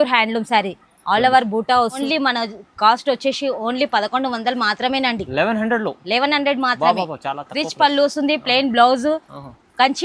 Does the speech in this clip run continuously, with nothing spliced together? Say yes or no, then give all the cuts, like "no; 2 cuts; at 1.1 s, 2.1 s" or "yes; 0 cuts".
no; 1 cut; at 2.0 s